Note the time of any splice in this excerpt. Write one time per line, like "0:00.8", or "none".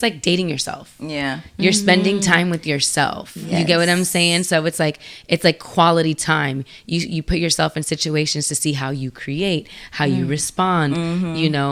none